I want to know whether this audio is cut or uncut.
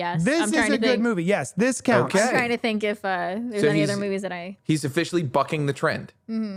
uncut